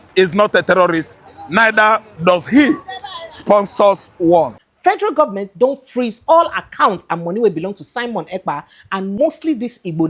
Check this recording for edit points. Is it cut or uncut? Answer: cut